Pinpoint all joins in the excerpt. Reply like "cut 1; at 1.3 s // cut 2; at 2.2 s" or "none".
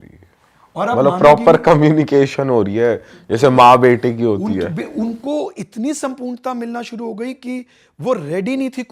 none